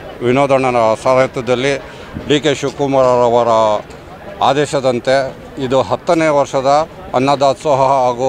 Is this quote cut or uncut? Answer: uncut